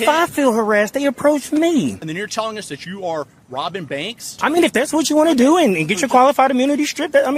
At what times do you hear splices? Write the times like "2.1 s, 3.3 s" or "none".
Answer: 2.0 s, 4.3 s